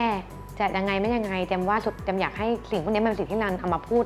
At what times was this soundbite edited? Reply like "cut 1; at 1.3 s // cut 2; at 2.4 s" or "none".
none